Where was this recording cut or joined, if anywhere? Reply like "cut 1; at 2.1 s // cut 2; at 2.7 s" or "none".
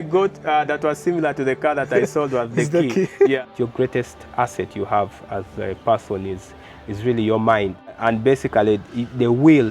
cut 1; at 3.4 s // cut 2; at 7.9 s